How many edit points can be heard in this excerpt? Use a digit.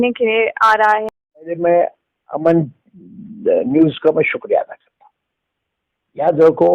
1